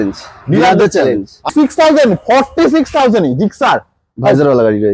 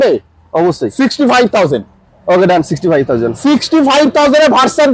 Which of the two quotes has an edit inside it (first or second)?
first